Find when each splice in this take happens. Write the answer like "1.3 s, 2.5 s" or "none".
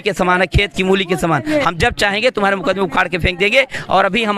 none